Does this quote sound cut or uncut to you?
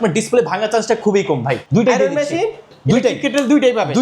cut